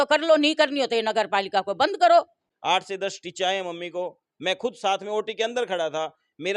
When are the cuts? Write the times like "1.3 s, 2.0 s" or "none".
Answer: 2.4 s